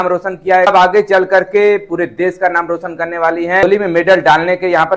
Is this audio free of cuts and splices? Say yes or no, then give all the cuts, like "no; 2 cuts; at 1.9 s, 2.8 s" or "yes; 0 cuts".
no; 2 cuts; at 0.7 s, 3.6 s